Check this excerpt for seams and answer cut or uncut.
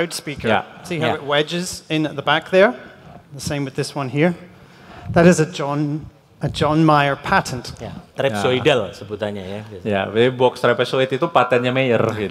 uncut